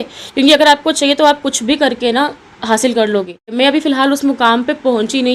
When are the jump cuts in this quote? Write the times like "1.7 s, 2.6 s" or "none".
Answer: 3.6 s